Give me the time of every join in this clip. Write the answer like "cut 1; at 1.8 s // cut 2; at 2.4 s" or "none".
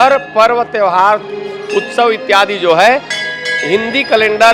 none